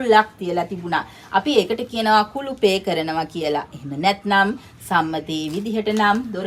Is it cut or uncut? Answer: uncut